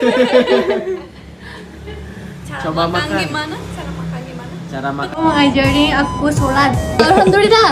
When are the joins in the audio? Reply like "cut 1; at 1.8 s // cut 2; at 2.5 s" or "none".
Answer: cut 1; at 5.0 s